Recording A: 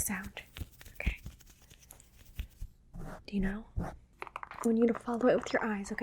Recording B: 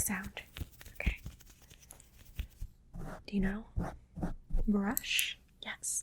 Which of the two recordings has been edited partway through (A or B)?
A